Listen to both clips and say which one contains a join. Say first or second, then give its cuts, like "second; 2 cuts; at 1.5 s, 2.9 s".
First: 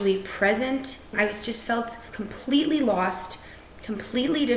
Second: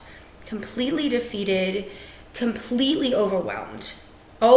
first; 2 cuts; at 1.1 s, 2.1 s